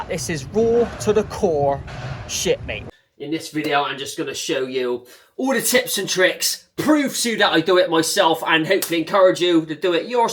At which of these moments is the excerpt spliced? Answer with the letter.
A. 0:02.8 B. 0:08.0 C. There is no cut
A